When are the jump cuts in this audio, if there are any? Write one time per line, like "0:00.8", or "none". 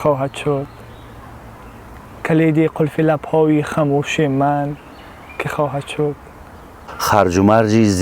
0:06.9